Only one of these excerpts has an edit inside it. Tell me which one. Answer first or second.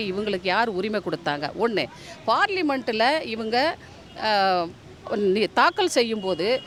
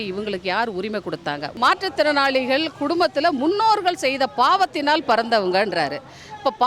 second